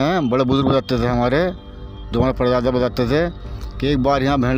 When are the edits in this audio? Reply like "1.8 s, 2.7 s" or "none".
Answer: none